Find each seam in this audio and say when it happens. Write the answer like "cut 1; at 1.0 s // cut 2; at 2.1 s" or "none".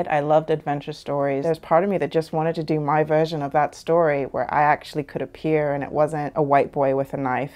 cut 1; at 1.4 s // cut 2; at 6.3 s